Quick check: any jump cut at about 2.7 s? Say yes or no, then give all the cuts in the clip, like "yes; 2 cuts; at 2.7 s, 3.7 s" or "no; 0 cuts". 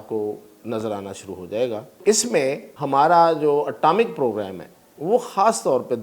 yes; 2 cuts; at 2.0 s, 2.7 s